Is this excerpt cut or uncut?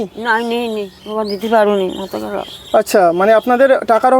uncut